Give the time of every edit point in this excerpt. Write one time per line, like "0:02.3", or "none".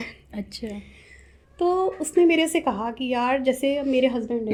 none